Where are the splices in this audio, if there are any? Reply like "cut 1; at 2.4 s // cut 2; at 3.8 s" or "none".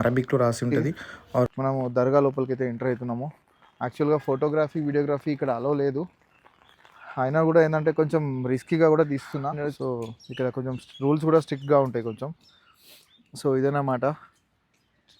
cut 1; at 1.5 s // cut 2; at 9.7 s